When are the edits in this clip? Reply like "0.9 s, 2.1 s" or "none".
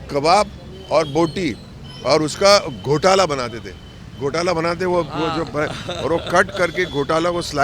none